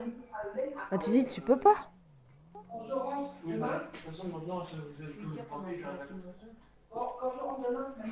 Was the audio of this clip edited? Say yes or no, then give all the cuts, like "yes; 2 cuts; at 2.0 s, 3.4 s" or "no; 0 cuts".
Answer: yes; 1 cut; at 1.4 s